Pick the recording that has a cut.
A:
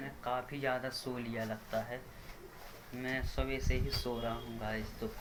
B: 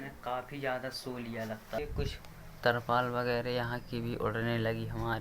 B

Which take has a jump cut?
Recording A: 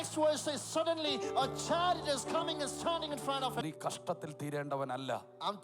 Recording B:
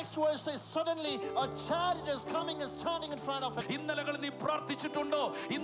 A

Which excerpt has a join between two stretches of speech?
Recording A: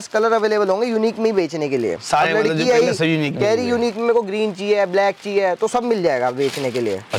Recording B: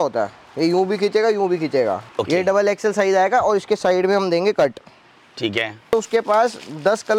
B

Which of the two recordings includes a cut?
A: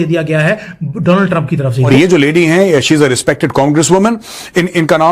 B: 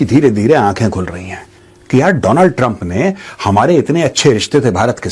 A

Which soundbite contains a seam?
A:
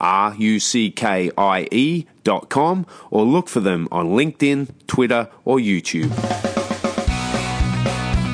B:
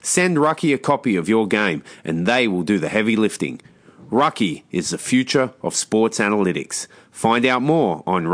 A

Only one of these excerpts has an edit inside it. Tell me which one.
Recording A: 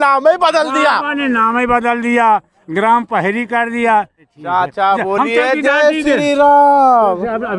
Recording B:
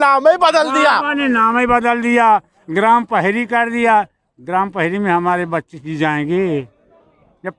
A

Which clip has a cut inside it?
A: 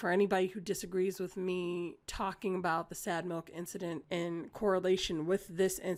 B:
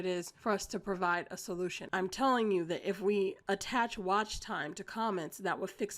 B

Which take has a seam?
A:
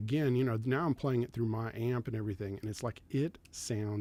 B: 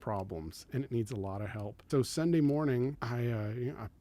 B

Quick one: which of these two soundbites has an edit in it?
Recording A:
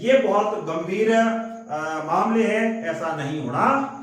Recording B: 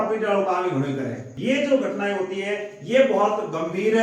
B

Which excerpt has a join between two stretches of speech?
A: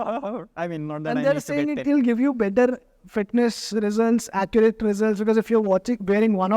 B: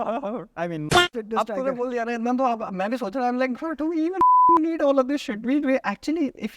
B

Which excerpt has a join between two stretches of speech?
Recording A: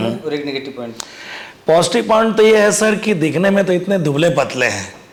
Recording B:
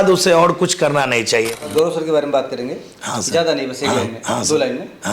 B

